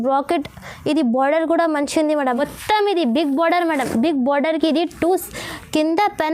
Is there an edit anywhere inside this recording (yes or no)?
yes